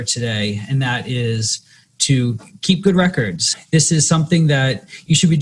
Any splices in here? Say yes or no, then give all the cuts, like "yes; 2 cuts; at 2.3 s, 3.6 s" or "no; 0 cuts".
yes; 1 cut; at 3.5 s